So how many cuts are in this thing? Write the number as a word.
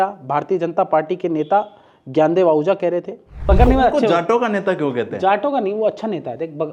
one